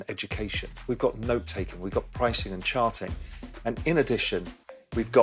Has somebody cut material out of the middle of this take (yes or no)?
no